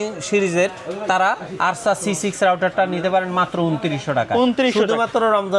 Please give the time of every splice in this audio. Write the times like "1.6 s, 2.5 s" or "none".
none